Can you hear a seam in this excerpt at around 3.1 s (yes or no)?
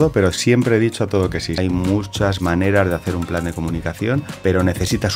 no